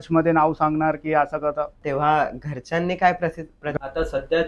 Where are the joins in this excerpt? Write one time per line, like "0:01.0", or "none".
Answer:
0:01.8
0:03.7